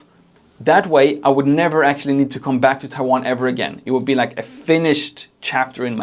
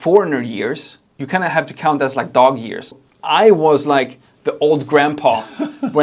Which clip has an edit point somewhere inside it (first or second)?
second